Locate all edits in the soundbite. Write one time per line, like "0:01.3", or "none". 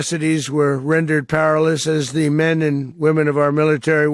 0:02.9